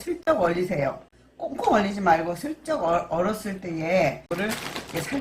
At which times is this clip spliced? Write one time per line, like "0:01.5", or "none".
0:04.3